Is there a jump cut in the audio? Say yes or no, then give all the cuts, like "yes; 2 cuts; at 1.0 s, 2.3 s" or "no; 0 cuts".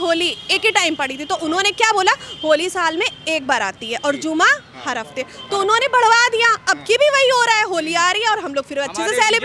no; 0 cuts